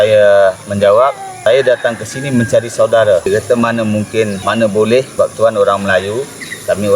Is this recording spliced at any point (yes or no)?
yes